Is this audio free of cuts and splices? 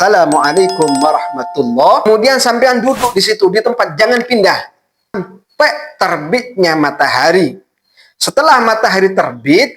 no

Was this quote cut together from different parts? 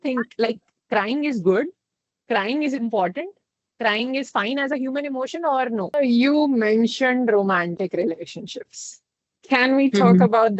yes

